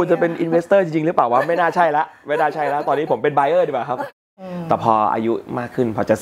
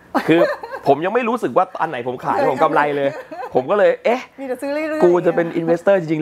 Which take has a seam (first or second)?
first